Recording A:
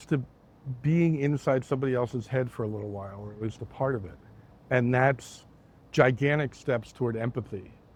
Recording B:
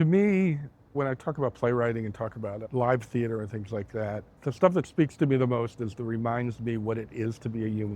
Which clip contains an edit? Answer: B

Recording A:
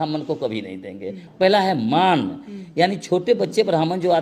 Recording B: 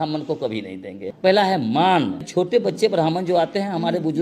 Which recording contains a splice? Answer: B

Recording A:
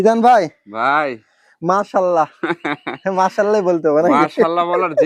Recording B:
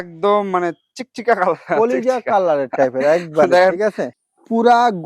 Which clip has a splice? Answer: B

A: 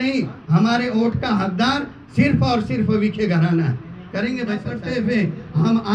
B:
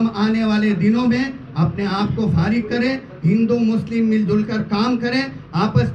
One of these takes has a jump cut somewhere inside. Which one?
A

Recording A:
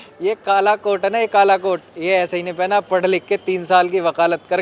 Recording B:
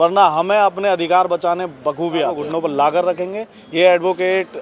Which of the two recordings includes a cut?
B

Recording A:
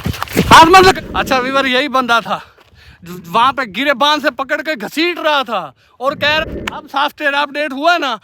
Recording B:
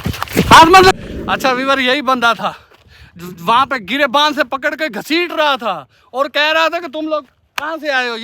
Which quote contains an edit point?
A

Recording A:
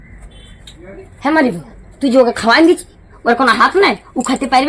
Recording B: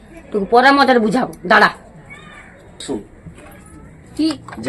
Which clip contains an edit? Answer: B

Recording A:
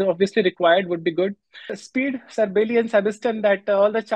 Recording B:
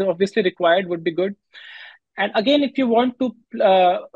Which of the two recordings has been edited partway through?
A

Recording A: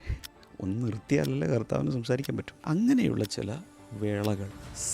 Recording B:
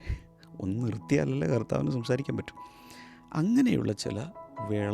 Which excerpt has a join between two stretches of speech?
A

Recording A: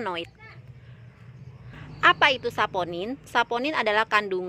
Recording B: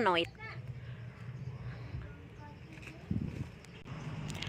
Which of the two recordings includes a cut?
A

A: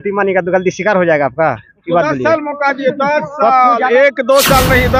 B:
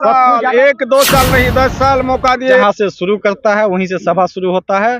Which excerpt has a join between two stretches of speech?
B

